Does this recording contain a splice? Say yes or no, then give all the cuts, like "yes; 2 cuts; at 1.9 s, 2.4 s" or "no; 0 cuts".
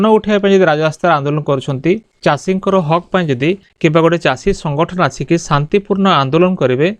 yes; 2 cuts; at 2.1 s, 3.7 s